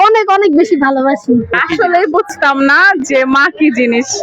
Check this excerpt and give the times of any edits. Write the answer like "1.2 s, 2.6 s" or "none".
1.5 s